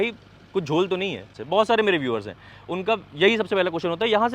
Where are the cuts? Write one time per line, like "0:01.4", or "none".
0:01.4